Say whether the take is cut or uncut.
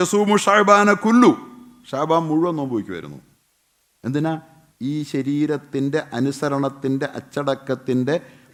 uncut